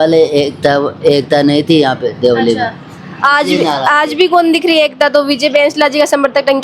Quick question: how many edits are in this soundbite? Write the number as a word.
zero